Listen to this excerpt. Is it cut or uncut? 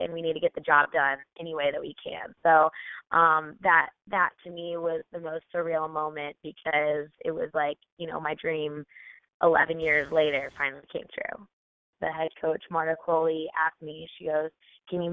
cut